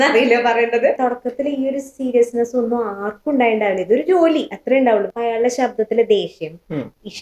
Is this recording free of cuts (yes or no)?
no